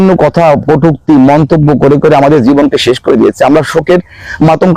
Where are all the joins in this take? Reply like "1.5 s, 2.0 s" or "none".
none